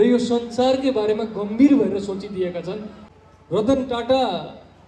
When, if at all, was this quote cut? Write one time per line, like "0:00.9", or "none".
0:03.0

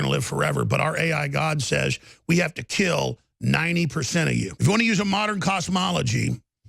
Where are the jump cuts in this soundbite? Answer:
0:04.5

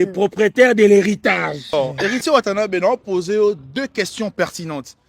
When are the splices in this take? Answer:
0:01.7

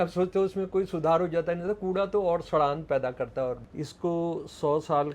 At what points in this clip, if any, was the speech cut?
0:03.7

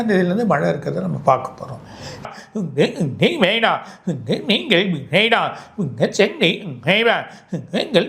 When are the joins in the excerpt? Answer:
0:02.2

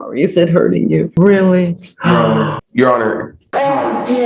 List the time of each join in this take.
0:01.1
0:02.6
0:03.3

